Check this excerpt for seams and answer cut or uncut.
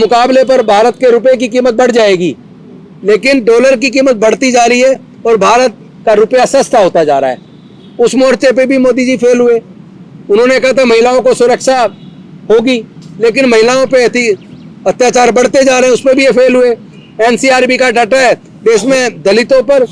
uncut